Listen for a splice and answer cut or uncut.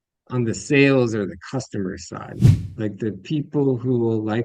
cut